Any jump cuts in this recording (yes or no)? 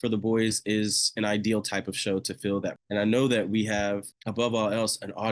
yes